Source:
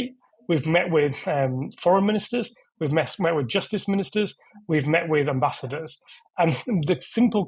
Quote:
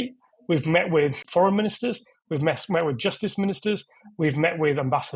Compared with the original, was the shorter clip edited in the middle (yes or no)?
yes